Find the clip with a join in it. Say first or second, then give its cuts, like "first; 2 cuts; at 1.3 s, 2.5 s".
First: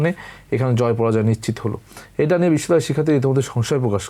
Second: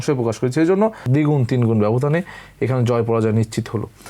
second; 1 cut; at 1.0 s